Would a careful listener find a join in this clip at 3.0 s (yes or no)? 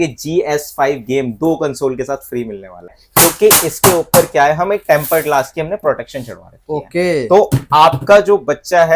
yes